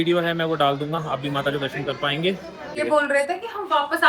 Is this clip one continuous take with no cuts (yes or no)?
no